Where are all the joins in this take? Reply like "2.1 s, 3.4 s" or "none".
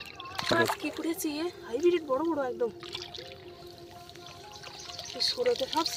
none